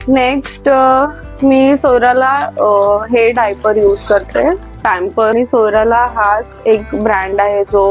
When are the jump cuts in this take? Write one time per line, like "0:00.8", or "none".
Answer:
0:05.3